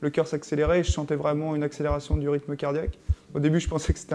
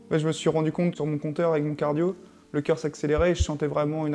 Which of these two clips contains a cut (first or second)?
second